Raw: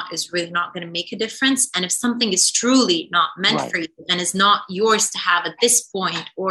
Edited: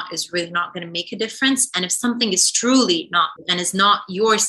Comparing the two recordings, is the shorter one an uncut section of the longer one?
no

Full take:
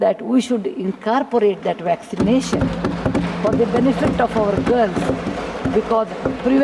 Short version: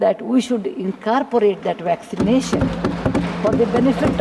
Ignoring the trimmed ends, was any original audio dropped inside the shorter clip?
no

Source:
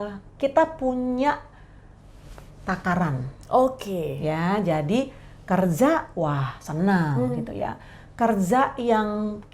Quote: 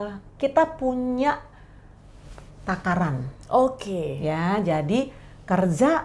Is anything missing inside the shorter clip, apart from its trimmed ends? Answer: no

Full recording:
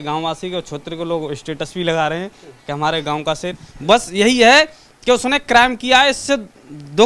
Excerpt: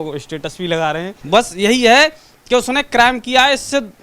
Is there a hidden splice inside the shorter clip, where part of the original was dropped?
yes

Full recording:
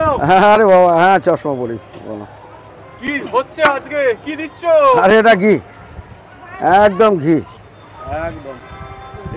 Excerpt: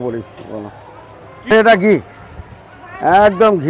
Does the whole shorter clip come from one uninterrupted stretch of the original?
no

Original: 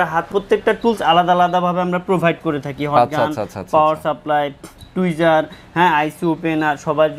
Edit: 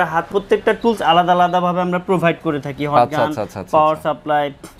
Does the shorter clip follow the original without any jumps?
yes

